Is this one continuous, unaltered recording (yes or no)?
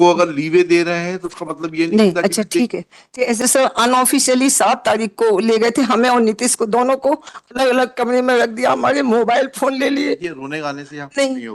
no